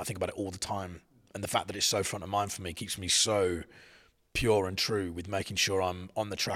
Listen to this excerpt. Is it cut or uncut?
uncut